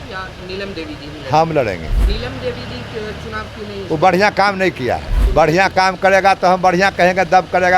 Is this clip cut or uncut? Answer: cut